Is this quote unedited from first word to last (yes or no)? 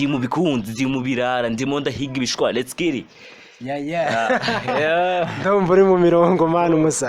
yes